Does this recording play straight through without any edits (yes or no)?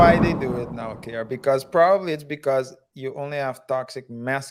yes